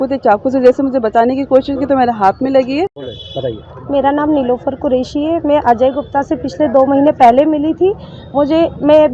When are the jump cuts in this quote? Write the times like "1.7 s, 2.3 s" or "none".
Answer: 3.0 s